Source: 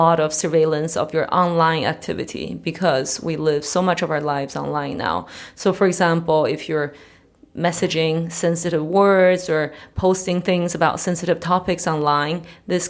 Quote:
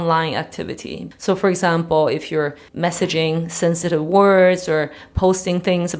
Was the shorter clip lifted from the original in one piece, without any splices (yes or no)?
no